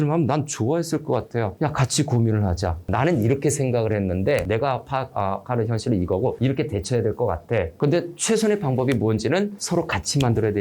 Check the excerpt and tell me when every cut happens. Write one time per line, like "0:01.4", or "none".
0:02.9
0:04.4